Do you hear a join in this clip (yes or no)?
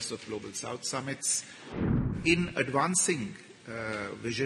yes